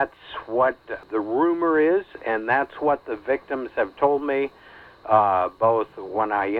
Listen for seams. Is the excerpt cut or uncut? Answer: cut